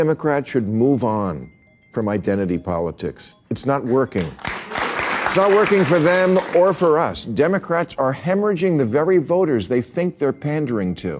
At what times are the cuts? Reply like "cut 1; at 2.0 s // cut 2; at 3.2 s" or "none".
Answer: cut 1; at 4.8 s